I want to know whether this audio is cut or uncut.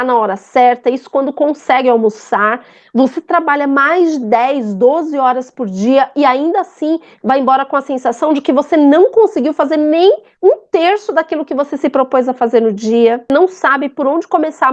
cut